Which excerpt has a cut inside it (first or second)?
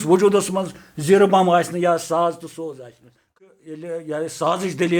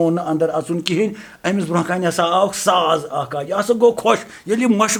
first